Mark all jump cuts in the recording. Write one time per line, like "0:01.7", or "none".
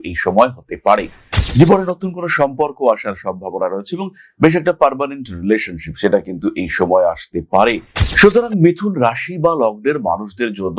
0:07.9